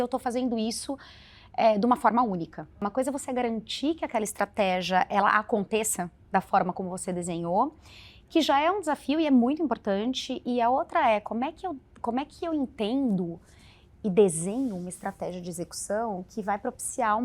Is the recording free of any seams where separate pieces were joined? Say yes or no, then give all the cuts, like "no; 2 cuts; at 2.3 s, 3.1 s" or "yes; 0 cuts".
no; 1 cut; at 2.9 s